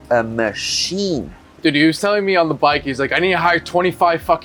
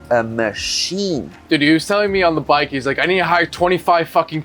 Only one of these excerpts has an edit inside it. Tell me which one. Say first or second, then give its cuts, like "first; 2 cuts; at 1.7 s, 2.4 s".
second; 1 cut; at 1.3 s